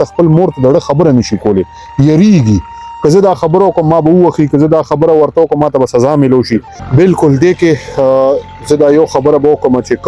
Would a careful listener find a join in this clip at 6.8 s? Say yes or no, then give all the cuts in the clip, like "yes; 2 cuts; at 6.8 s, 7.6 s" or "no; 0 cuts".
yes; 1 cut; at 6.8 s